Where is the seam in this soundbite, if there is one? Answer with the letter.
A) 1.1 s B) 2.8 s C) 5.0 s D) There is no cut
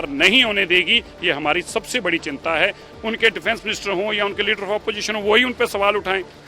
B